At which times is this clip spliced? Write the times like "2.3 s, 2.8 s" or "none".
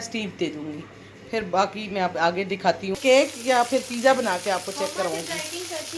3.0 s